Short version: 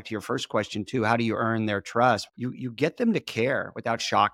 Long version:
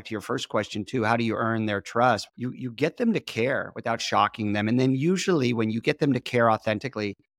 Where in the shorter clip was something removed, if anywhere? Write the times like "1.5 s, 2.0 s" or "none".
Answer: none